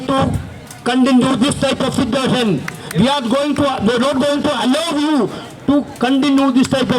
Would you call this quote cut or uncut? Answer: uncut